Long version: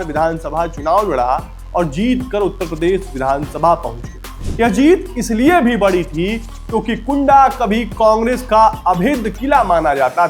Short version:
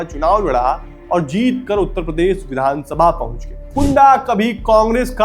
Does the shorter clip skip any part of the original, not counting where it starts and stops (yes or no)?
yes